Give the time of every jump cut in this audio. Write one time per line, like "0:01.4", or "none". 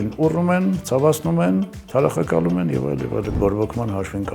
0:03.3